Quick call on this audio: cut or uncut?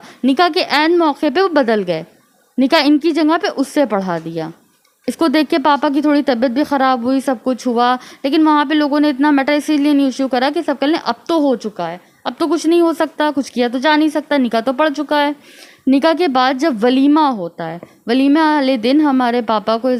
uncut